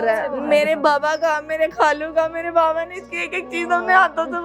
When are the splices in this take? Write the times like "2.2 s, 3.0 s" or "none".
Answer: none